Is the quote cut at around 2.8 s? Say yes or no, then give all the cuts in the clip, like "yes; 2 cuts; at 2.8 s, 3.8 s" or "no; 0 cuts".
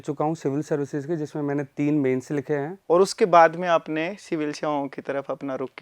yes; 1 cut; at 2.8 s